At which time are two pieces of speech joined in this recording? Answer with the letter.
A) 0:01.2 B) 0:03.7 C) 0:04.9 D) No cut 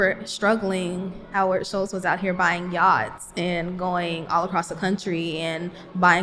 A